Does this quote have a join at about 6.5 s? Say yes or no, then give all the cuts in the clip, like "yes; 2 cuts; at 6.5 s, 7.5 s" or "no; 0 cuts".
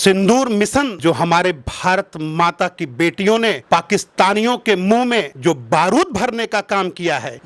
no; 1 cut; at 0.9 s